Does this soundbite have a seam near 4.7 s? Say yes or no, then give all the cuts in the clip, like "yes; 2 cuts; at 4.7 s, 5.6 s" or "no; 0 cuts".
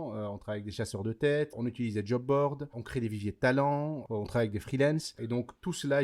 no; 2 cuts; at 1.5 s, 2.8 s